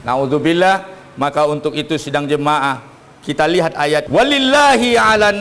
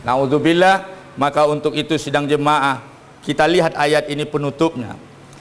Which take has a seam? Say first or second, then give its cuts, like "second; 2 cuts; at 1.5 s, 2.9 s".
first; 1 cut; at 4.1 s